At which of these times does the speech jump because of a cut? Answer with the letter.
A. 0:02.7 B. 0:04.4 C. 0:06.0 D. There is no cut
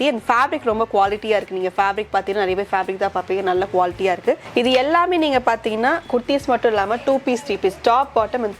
B